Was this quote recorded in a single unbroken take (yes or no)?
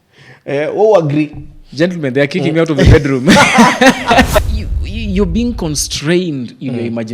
no